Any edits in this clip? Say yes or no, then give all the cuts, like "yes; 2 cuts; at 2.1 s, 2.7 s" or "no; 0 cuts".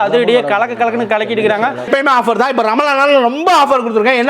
yes; 1 cut; at 1.9 s